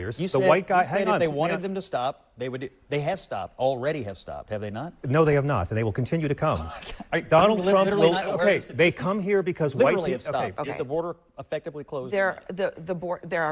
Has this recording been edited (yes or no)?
yes